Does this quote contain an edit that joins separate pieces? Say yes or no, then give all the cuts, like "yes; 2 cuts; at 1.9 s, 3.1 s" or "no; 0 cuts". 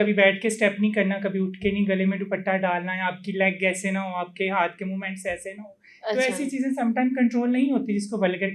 no; 0 cuts